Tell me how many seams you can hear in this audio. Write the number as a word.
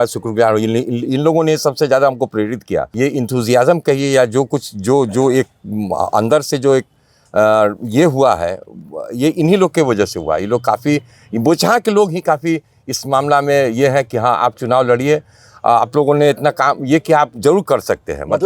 one